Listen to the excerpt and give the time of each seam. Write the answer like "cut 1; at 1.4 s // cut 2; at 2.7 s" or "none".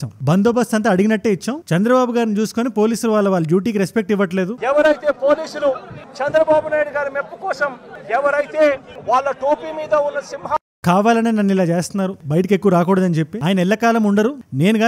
cut 1; at 1.6 s